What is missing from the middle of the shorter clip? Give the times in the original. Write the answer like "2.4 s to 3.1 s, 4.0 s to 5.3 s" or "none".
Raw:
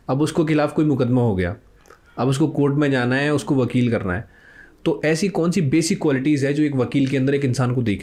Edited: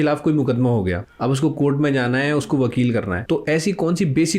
1.6 s to 2.0 s, 4.1 s to 4.7 s